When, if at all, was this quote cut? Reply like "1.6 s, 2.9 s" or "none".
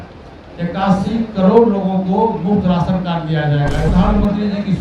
3.9 s